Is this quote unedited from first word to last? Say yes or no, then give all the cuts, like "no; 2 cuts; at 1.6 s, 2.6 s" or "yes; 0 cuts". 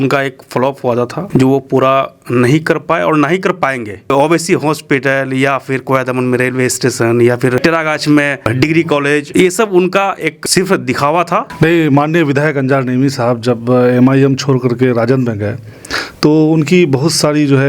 no; 3 cuts; at 1.2 s, 4.0 s, 11.5 s